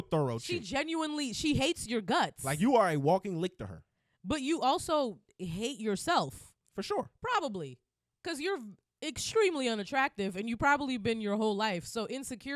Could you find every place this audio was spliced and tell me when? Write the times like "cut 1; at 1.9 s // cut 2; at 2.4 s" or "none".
none